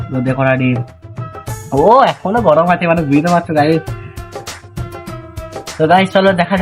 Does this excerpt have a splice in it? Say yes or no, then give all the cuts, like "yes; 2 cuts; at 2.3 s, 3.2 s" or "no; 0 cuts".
no; 0 cuts